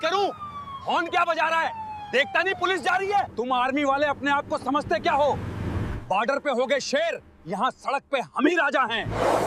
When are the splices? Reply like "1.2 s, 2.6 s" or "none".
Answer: 3.3 s

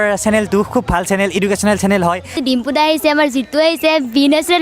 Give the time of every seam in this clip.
2.4 s

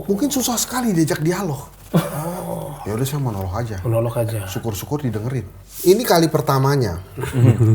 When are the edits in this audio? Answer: 5.6 s

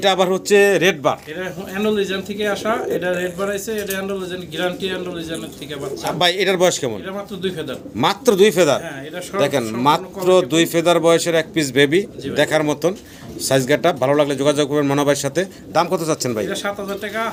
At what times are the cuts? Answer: none

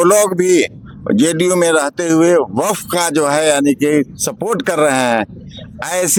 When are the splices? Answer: none

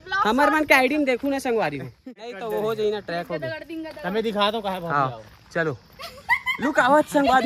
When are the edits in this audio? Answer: 2.0 s

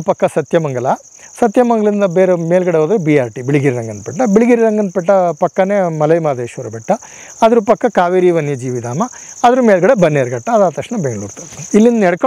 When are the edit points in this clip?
none

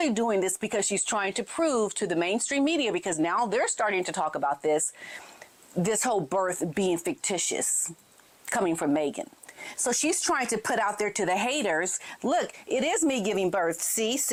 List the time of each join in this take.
none

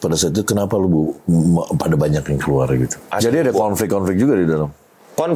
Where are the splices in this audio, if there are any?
3.1 s

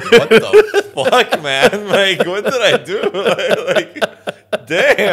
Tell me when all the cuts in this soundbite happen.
none

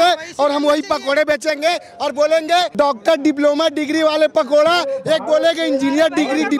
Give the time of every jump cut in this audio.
2.7 s

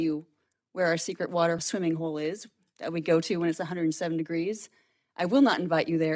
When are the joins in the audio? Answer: 1.6 s

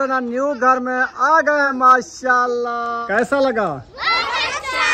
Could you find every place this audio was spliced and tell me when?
1.7 s, 3.0 s

